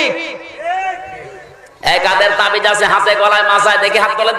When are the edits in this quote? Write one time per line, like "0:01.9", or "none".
none